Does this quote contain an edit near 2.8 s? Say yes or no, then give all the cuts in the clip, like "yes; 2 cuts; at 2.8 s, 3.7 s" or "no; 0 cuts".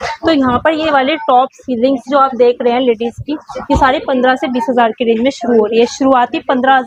no; 0 cuts